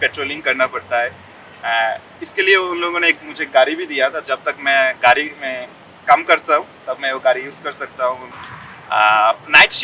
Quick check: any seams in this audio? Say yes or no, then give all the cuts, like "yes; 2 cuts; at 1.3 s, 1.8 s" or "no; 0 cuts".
yes; 1 cut; at 8.3 s